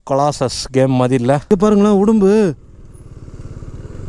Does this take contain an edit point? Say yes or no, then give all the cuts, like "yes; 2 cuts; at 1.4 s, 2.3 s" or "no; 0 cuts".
yes; 1 cut; at 1.4 s